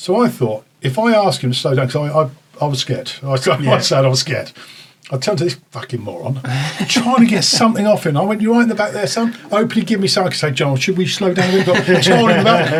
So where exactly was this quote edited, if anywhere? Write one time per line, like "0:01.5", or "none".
none